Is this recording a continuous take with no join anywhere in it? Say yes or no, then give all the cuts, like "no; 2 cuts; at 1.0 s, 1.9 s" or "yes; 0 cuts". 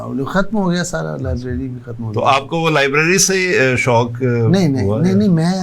yes; 0 cuts